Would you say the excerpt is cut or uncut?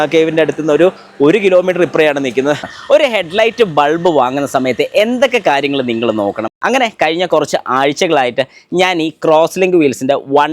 cut